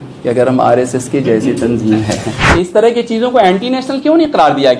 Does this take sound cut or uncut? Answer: cut